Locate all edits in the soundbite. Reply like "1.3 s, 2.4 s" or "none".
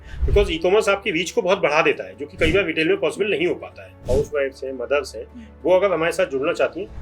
4.0 s